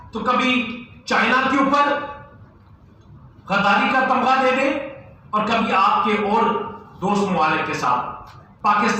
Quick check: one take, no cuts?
yes; 0 cuts

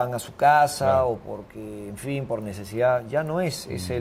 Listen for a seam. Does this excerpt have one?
no; 0 cuts

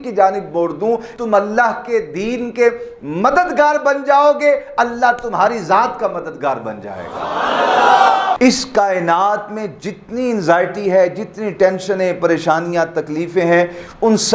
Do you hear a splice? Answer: yes; 2 cuts; at 1.1 s, 8.4 s

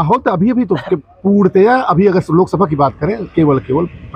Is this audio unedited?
yes; 0 cuts

